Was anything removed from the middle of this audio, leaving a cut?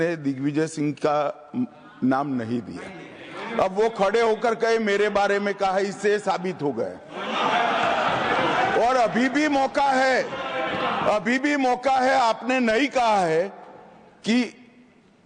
no; 0 cuts

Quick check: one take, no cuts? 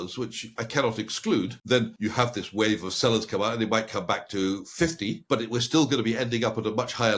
no; 2 cuts; at 1.8 s, 5.2 s

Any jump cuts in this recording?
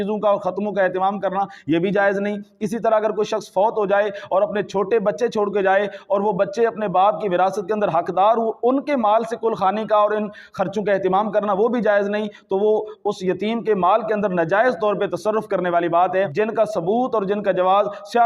yes; 1 cut; at 16.3 s

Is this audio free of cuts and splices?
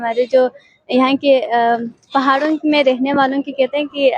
yes; 0 cuts

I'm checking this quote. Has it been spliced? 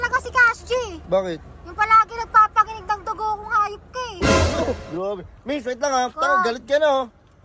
no; 0 cuts

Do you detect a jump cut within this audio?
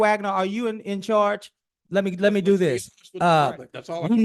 no; 0 cuts

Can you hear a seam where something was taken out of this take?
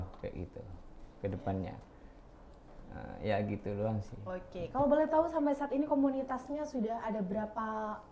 no; 0 cuts

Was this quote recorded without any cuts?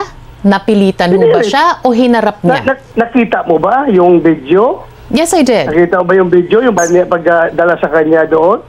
yes; 0 cuts

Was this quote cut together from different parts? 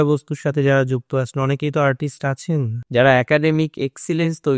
yes; 1 cut; at 2.8 s

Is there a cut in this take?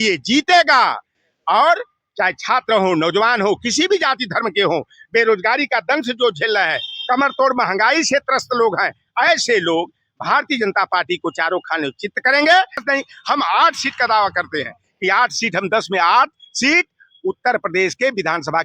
yes; 1 cut; at 12.8 s

